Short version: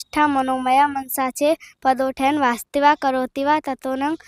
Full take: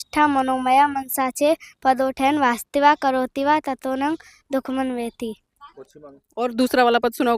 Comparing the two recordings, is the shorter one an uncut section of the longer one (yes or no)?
yes